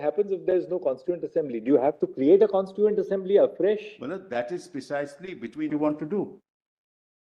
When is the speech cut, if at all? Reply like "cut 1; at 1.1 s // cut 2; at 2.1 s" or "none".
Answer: cut 1; at 5.7 s